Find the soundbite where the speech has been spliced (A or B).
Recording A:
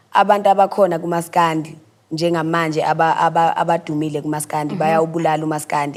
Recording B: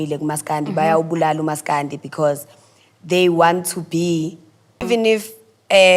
B